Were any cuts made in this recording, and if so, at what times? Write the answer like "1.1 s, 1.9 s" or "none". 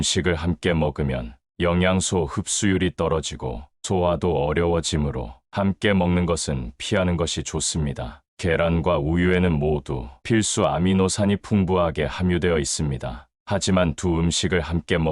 1.4 s